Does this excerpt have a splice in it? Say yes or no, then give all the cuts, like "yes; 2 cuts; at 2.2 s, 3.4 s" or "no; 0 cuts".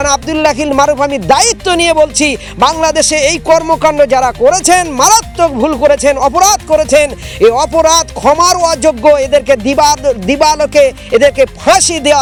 no; 0 cuts